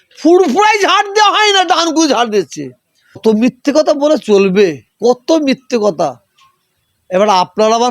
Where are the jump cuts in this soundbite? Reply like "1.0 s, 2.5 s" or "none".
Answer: 3.2 s